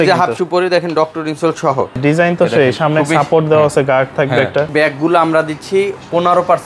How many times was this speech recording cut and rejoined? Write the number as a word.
two